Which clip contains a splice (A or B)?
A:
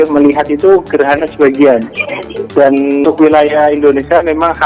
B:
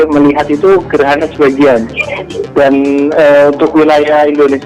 A